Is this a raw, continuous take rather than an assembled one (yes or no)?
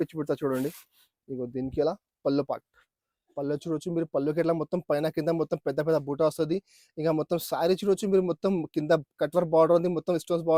yes